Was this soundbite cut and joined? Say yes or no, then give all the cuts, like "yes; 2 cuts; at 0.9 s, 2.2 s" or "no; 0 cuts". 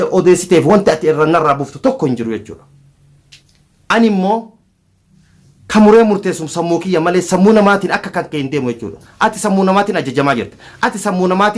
no; 0 cuts